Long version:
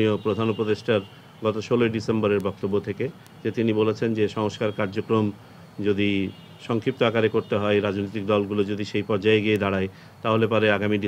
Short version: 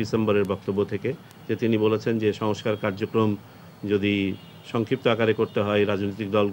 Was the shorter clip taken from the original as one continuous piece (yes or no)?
yes